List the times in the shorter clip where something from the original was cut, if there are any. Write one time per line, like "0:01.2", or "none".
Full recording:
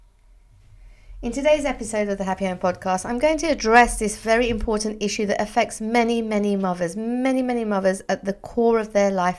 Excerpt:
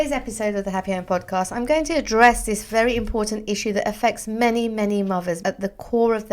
0:05.4